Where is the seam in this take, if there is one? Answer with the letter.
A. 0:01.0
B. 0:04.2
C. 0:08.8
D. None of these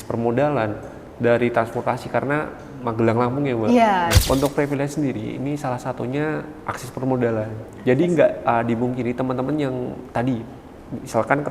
B